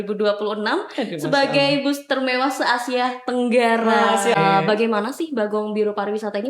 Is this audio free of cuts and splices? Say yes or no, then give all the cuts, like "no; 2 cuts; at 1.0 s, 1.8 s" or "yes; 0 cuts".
no; 1 cut; at 4.4 s